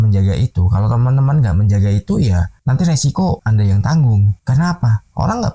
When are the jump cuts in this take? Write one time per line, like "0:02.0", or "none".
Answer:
none